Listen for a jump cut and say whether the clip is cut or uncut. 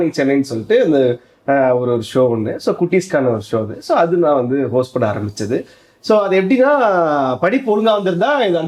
uncut